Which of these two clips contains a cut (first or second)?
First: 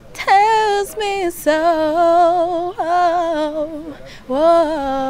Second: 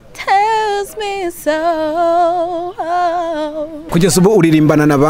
second